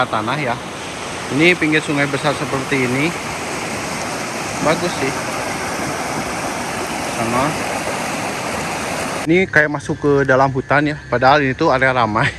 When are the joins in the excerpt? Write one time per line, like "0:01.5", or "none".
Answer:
0:09.2